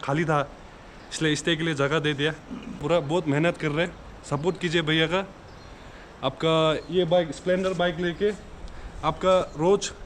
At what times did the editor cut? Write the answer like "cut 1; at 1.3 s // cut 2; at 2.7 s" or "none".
cut 1; at 2.8 s